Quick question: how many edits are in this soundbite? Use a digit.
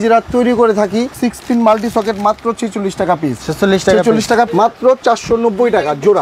2